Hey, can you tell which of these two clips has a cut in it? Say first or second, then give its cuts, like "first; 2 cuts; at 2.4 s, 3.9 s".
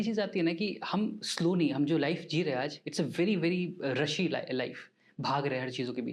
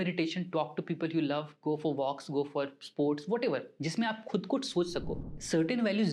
second; 1 cut; at 5.2 s